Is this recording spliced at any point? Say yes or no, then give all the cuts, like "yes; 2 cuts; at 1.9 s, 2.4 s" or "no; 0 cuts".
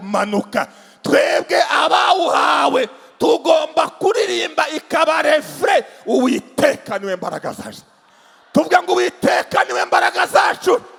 no; 0 cuts